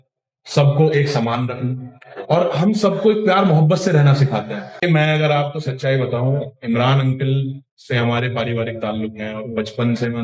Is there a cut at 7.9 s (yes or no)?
no